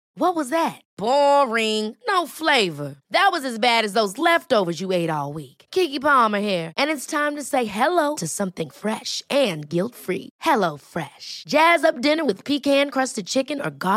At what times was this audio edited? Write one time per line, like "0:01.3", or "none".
none